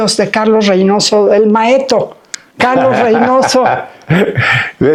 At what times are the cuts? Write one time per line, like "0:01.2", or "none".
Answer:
none